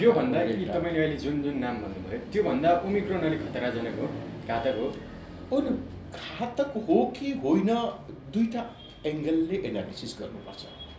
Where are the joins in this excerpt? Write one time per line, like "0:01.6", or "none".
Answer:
none